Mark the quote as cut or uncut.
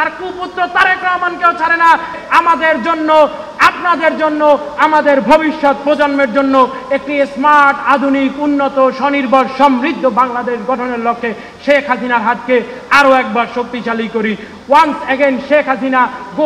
uncut